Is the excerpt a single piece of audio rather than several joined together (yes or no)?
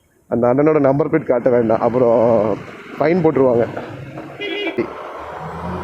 no